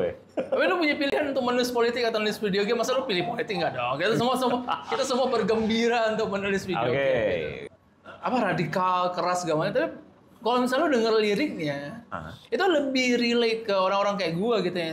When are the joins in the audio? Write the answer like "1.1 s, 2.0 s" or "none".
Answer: 7.6 s